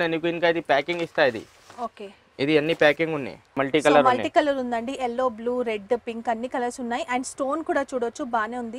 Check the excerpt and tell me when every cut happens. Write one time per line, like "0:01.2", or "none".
0:03.6